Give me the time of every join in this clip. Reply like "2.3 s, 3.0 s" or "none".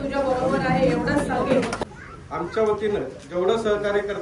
1.8 s